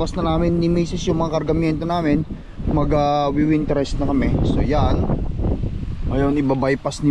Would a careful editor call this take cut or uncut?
uncut